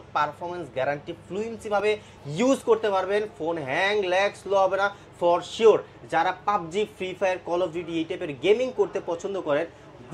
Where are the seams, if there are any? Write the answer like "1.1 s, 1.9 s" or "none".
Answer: none